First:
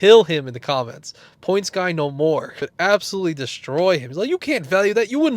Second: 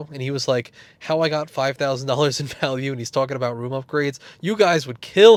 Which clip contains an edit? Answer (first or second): first